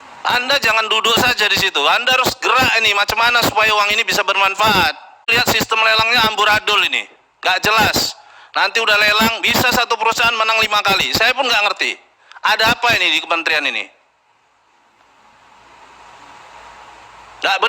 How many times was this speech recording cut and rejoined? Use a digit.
1